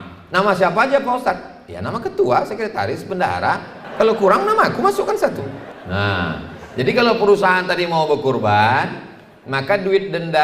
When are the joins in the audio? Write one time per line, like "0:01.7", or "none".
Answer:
0:03.8
0:05.7